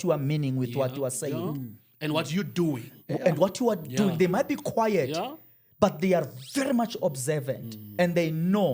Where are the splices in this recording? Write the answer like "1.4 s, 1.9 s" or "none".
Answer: none